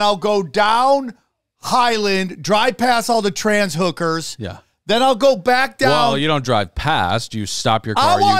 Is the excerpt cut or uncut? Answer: uncut